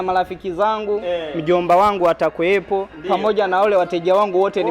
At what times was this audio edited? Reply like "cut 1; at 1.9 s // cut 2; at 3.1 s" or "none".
none